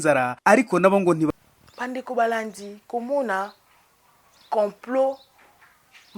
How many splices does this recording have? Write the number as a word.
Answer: one